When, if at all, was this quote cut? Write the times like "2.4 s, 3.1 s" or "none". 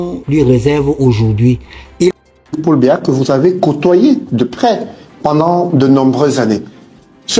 2.1 s